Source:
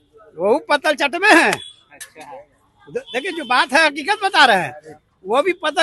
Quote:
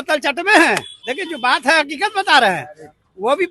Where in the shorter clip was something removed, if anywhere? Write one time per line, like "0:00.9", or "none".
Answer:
0:01.0